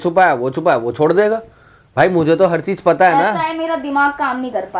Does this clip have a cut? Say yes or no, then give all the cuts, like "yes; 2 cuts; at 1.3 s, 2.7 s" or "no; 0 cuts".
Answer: no; 0 cuts